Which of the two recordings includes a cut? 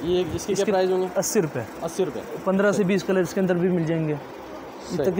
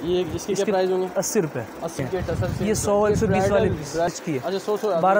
second; 2 cuts; at 2.0 s, 4.1 s

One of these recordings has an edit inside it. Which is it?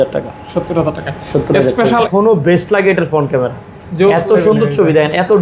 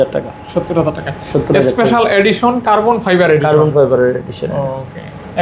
first; 1 cut; at 2.1 s

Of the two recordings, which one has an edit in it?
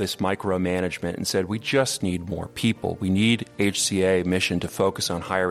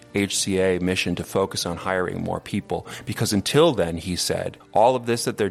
second; 1 cut; at 4.5 s

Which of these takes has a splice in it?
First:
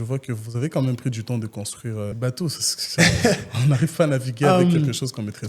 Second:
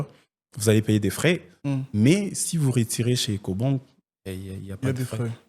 first; 1 cut; at 2.1 s

